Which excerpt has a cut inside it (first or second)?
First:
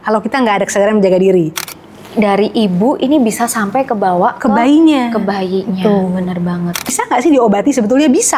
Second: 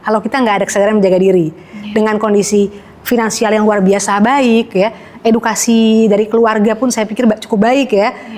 first